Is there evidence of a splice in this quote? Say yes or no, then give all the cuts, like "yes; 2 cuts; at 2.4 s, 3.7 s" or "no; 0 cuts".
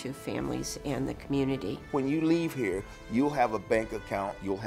yes; 1 cut; at 1.8 s